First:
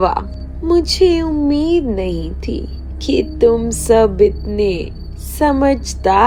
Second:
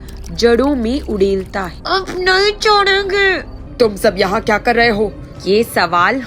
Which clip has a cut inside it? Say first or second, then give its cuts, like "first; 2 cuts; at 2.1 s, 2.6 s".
second; 3 cuts; at 1.7 s, 3.6 s, 5.3 s